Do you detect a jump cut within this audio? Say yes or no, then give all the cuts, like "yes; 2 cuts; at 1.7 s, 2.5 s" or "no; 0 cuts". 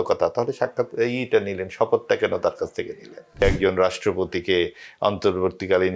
yes; 1 cut; at 3.4 s